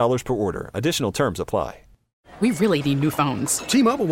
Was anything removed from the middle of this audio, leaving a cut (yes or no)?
yes